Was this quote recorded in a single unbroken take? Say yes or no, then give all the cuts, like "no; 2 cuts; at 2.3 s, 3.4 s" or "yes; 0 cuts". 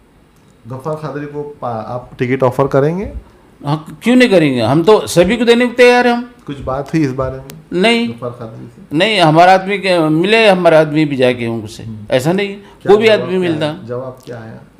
yes; 0 cuts